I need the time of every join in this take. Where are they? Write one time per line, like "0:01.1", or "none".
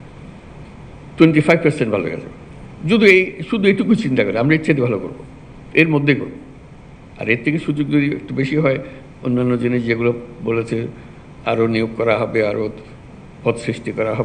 none